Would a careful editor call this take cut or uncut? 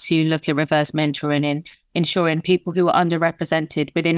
uncut